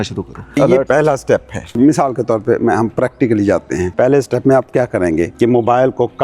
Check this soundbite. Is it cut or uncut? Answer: cut